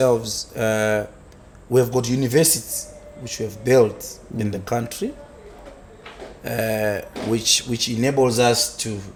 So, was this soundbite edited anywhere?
no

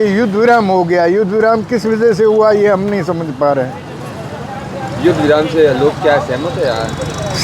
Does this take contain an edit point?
no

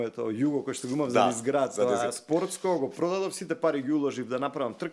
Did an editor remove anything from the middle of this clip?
no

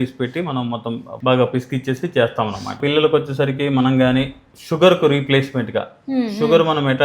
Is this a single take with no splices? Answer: no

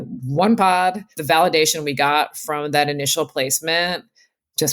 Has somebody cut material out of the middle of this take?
yes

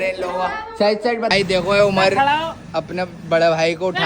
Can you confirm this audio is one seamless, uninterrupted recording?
no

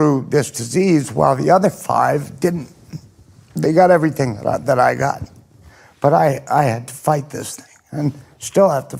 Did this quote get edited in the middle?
no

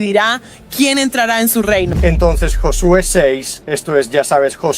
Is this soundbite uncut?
no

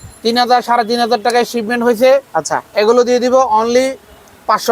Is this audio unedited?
yes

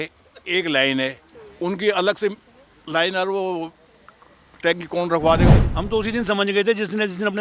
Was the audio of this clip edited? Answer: yes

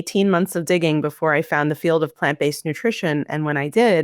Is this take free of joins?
yes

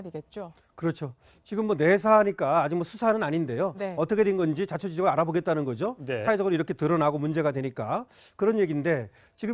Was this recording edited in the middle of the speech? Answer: yes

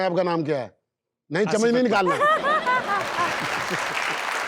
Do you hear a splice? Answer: no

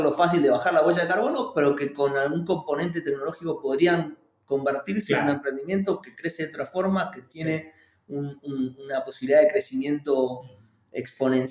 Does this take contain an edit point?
no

